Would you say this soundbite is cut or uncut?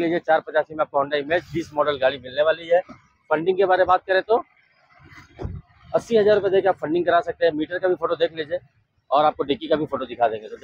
uncut